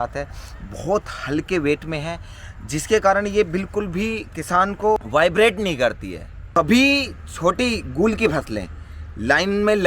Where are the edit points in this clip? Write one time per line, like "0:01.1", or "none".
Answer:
0:05.0
0:06.3